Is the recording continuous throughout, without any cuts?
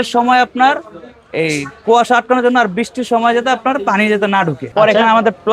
no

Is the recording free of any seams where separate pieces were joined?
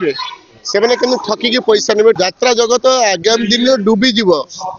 no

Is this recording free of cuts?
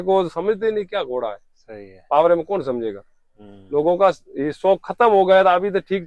yes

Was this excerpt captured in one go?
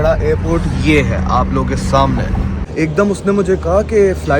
no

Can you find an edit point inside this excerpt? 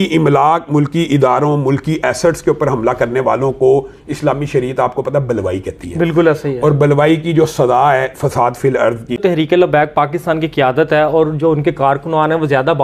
yes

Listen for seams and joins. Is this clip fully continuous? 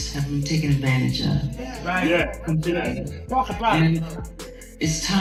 yes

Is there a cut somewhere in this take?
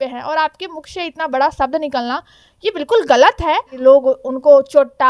yes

